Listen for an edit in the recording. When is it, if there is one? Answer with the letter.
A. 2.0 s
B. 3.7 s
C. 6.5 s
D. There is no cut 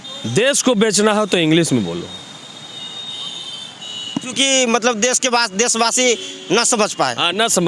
D